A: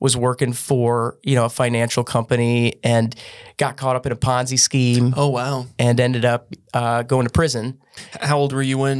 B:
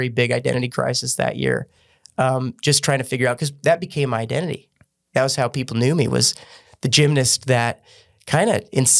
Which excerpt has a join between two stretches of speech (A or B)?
A